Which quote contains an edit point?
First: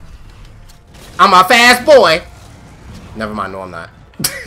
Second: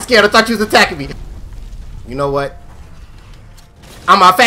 second; 1 cut; at 1.2 s

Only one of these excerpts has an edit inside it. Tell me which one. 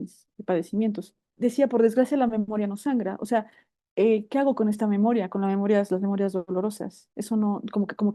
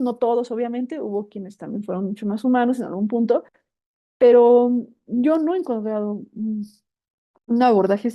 first; 1 cut; at 1.3 s

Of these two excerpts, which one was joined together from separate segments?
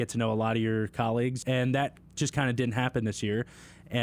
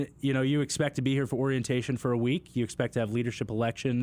first; 1 cut; at 1.4 s

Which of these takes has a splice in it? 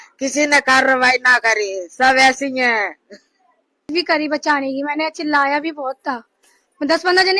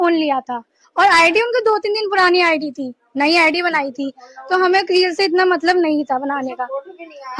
first; 1 cut; at 3.9 s

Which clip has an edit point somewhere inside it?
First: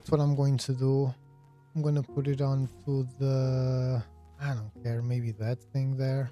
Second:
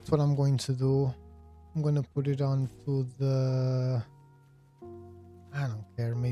first; 1 cut; at 4.2 s

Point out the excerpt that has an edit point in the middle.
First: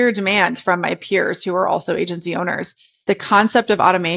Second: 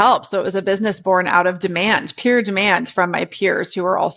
first; 1 cut; at 2.9 s

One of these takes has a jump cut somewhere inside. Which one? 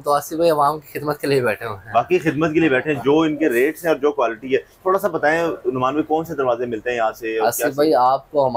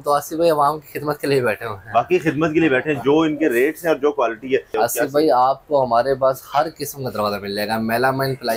second; 1 cut; at 4.7 s

